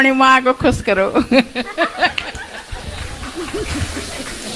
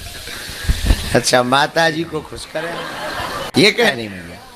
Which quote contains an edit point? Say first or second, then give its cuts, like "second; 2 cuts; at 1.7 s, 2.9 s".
second; 1 cut; at 2.4 s